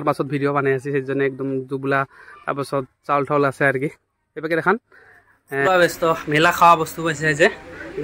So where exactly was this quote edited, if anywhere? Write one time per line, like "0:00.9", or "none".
0:05.7